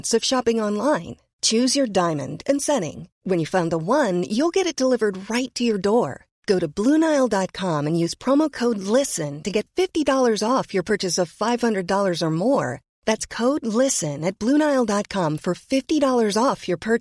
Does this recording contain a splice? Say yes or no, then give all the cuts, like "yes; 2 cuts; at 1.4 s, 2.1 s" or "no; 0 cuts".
no; 0 cuts